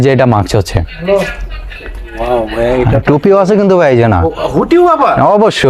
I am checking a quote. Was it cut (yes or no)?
no